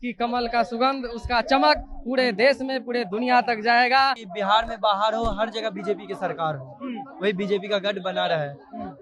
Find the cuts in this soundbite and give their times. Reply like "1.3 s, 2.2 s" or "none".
4.2 s